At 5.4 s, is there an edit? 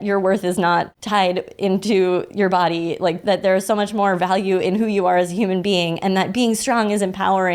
no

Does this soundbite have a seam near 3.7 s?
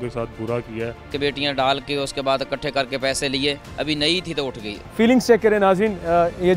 no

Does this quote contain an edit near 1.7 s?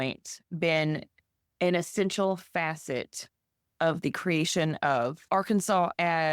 no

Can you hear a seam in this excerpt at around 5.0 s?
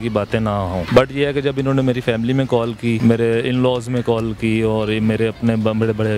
no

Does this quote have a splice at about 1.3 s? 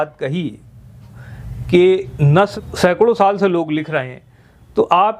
no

